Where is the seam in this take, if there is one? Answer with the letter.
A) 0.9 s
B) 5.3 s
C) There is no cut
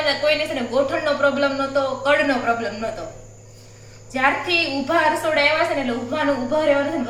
C